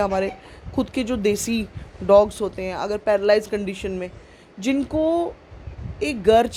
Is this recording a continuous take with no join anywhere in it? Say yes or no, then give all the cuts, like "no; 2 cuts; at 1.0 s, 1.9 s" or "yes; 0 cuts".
yes; 0 cuts